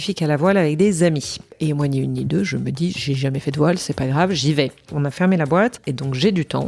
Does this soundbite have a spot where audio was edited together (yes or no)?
yes